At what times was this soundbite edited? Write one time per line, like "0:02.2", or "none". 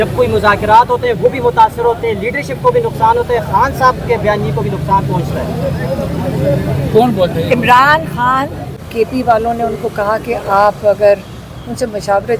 0:08.8